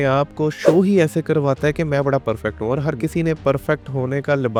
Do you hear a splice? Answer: no; 0 cuts

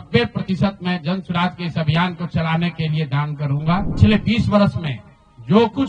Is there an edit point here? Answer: yes; 1 cut; at 3.9 s

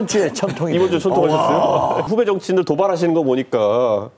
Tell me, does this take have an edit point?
yes; 1 cut; at 2.1 s

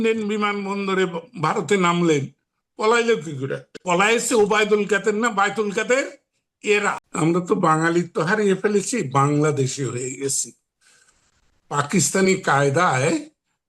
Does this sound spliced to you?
yes; 2 cuts; at 3.7 s, 7.0 s

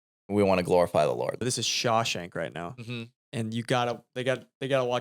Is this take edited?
yes; 1 cut; at 1.4 s

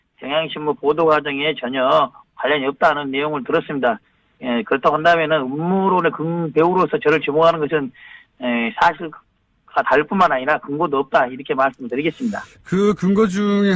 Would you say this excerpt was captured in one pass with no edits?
yes; 0 cuts

